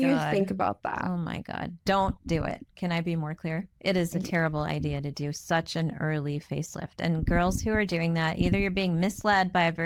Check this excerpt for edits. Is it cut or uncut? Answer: uncut